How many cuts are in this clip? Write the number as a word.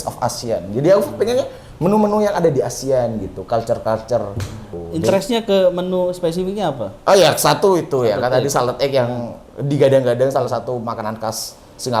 one